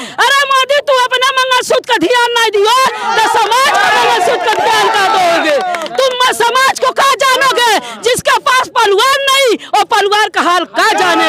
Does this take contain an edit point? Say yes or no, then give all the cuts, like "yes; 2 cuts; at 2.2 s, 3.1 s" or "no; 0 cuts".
no; 0 cuts